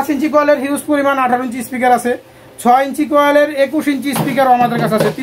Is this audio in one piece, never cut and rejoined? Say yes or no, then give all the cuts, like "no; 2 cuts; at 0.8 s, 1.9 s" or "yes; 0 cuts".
yes; 0 cuts